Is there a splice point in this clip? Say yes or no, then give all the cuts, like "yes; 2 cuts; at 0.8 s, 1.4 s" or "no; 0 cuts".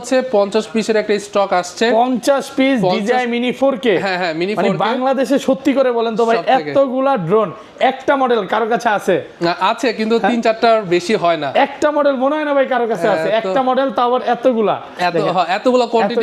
no; 0 cuts